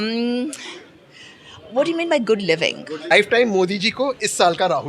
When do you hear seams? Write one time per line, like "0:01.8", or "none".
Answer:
0:03.0